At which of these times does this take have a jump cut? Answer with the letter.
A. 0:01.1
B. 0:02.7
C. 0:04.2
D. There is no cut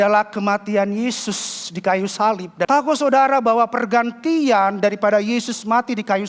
B